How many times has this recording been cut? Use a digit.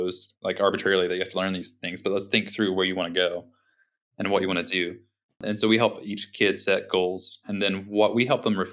3